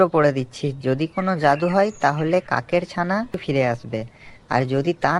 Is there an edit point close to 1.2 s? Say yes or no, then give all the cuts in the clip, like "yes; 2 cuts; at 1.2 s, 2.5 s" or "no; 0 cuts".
no; 1 cut; at 3.4 s